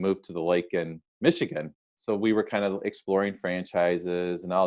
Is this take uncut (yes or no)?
no